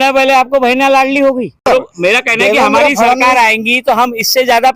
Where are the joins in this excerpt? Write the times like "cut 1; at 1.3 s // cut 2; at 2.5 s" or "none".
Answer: cut 1; at 1.7 s